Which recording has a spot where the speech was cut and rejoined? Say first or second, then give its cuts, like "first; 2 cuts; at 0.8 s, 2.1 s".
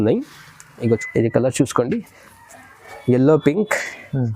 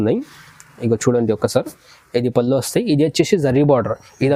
first; 1 cut; at 1.0 s